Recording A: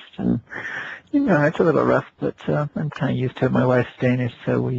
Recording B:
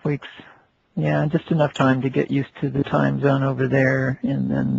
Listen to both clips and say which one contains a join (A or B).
A